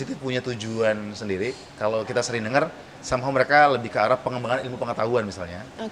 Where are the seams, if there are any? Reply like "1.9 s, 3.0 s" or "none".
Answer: none